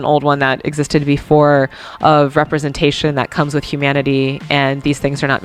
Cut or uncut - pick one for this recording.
uncut